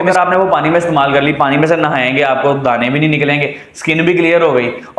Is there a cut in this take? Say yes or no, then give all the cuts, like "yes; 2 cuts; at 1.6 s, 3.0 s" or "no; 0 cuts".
no; 0 cuts